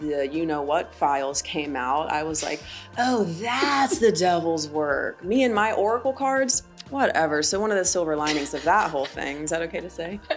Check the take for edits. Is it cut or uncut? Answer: uncut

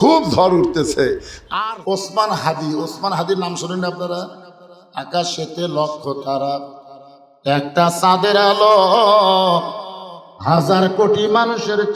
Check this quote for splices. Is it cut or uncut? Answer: cut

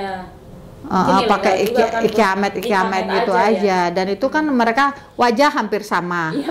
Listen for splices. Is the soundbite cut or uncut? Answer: uncut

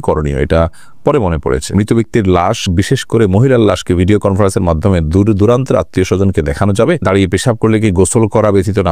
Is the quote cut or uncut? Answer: cut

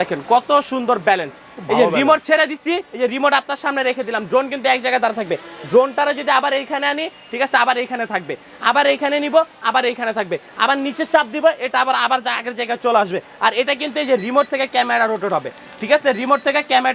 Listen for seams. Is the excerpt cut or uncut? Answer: uncut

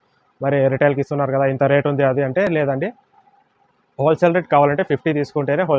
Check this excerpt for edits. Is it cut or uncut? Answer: uncut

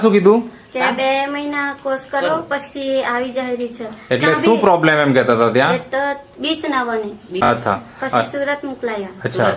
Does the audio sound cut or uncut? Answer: cut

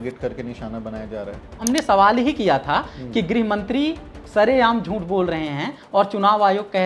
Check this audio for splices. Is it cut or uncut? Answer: cut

